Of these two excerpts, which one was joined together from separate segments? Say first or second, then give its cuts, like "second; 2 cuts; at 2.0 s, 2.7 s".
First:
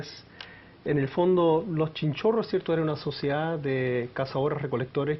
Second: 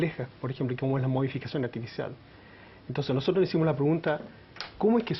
first; 1 cut; at 3.3 s